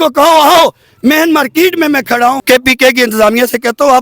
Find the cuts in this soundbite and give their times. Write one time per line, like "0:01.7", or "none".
0:02.4